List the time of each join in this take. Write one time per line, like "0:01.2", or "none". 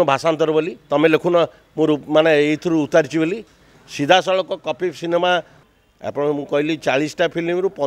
0:05.5

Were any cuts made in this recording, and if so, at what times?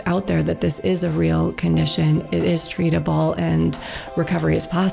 none

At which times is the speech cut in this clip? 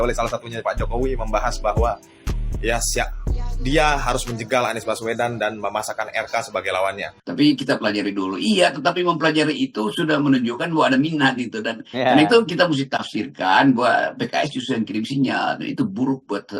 0:07.1

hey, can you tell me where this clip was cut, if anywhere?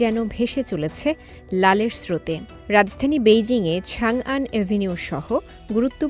none

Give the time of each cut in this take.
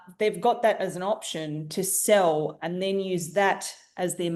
none

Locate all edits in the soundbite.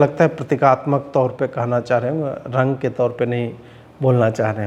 none

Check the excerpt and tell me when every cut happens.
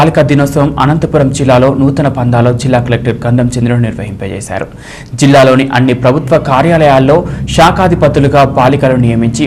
none

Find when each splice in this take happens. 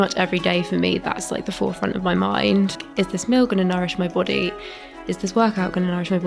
0:02.8

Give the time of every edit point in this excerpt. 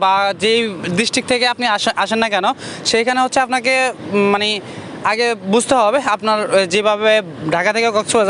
none

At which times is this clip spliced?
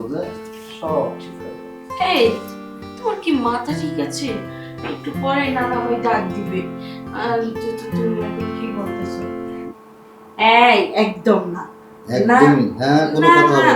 0:09.7

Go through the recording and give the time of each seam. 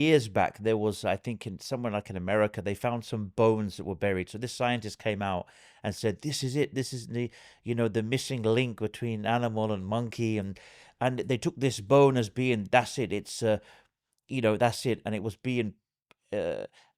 none

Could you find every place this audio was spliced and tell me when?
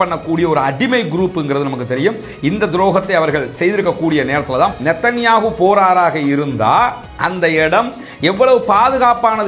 0:04.7

